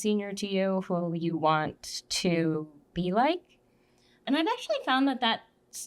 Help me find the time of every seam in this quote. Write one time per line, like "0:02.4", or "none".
0:04.2